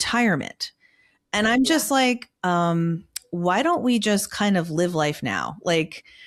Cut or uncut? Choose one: uncut